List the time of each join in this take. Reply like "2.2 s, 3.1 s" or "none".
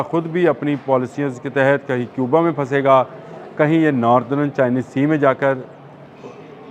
none